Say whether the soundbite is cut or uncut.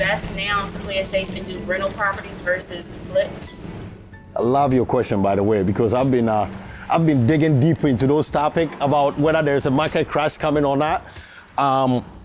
uncut